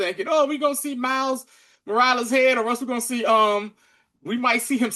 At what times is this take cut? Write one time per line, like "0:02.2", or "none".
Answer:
none